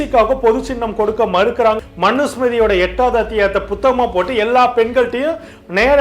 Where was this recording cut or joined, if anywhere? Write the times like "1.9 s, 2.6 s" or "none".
1.8 s